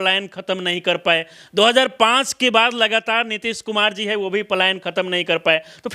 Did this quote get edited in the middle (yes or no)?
no